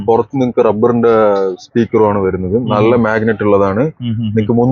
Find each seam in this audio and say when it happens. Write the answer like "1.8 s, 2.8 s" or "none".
none

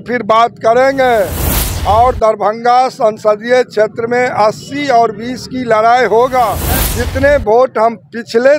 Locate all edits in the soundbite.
6.8 s

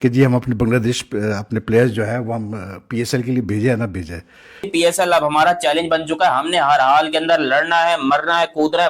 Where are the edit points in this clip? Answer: 4.7 s

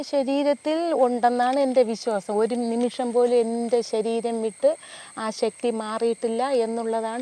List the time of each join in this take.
none

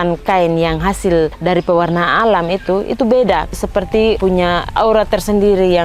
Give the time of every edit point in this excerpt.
3.5 s

